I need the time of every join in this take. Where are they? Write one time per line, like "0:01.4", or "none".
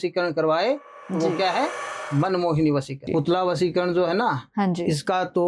0:03.0

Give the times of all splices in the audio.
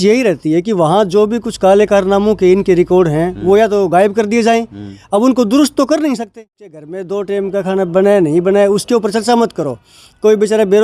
0:06.9

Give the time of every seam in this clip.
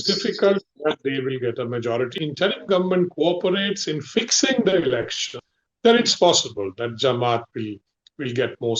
0:02.1

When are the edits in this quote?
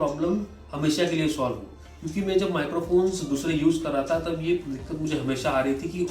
none

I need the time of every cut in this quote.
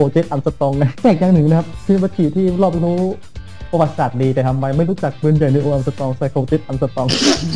0:00.9
0:01.7

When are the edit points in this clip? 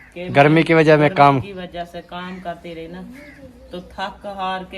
none

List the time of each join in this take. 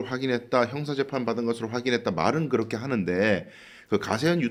none

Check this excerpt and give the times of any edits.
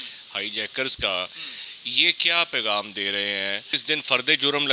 0:03.8

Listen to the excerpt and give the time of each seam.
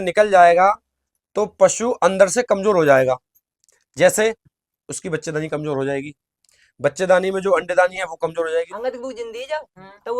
0:08.7

